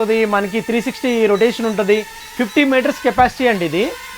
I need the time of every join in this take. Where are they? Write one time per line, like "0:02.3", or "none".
none

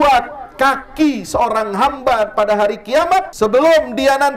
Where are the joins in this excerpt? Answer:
0:03.3

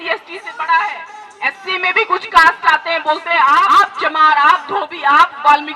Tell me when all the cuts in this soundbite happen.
0:03.7

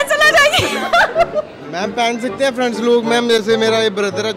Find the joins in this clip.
0:01.6

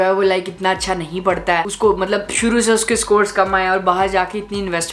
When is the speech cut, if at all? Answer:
none

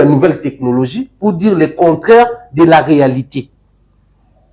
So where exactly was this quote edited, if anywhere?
none

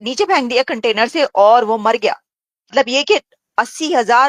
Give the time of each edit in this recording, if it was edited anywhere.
0:02.7

